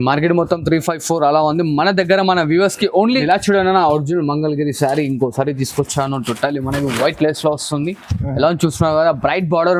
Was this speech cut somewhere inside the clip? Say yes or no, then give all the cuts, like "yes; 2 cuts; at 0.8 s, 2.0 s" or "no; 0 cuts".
yes; 1 cut; at 3.2 s